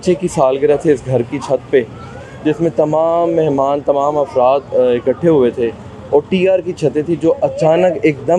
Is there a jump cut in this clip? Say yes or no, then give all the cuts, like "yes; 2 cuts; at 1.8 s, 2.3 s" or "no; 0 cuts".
no; 0 cuts